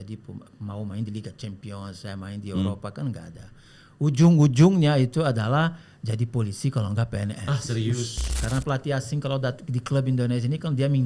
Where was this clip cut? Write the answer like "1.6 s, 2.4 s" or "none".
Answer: 8.4 s